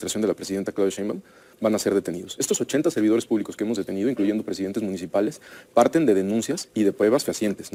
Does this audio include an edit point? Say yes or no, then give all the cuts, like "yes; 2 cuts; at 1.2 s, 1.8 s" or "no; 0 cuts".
no; 0 cuts